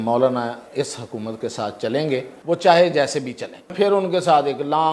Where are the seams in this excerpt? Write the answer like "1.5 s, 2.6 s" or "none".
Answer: 2.3 s, 3.7 s

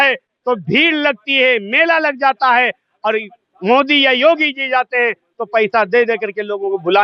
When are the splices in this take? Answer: none

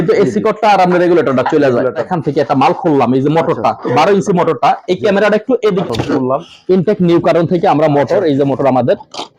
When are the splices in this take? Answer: 2.0 s, 5.8 s

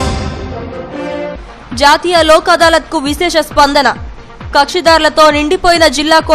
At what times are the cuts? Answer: 1.1 s

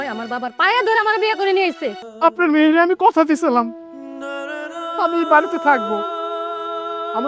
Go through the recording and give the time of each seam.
2.0 s

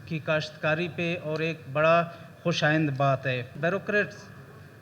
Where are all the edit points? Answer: 3.5 s

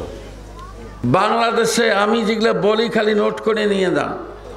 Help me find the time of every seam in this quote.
1.0 s

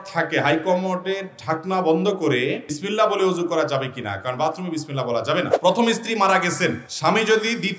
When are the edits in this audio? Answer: 2.7 s, 5.5 s, 6.9 s

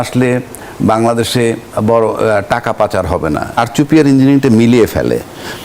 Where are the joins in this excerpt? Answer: 3.6 s

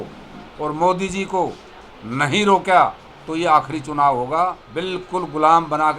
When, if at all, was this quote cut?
4.7 s

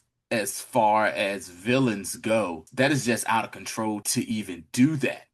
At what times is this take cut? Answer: 2.6 s, 4.0 s

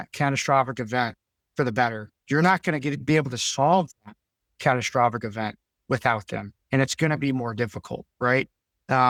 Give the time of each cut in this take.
none

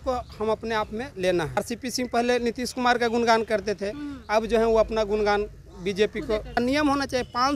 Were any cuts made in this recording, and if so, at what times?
1.6 s, 6.6 s

